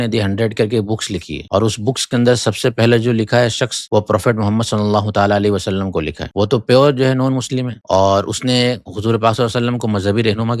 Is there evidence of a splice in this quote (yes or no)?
no